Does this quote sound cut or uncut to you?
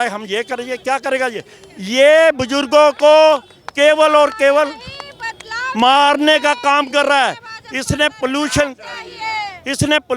uncut